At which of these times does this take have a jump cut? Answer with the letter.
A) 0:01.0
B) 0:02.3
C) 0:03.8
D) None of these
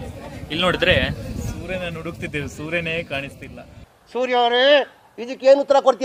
D